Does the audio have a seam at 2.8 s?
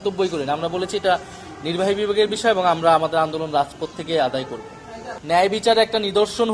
no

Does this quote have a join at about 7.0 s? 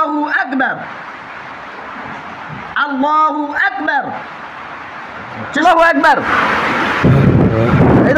no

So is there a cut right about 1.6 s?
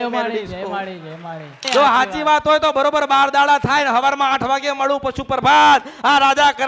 yes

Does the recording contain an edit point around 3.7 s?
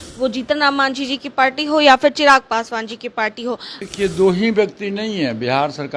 yes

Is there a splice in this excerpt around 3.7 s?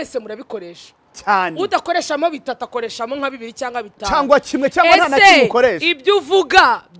no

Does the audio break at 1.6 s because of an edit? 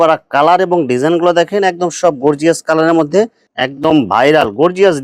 no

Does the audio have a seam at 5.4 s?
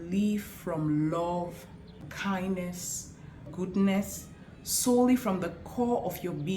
no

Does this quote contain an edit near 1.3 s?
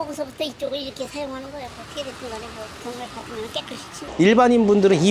no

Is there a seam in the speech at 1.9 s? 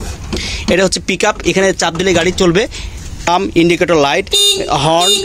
no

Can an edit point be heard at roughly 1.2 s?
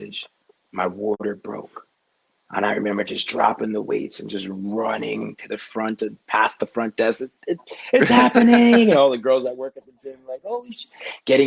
yes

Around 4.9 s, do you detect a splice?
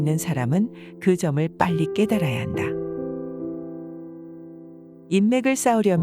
yes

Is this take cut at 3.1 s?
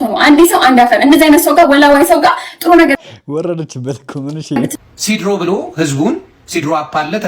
no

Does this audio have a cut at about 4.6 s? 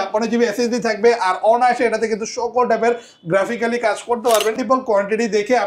yes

